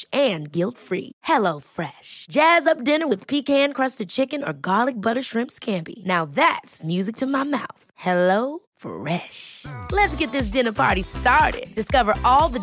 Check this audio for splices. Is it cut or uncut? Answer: uncut